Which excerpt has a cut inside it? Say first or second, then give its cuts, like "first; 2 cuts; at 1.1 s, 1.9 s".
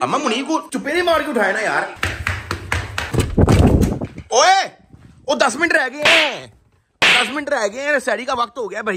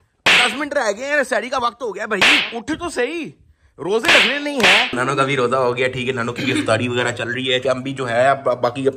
second; 2 cuts; at 4.9 s, 7.6 s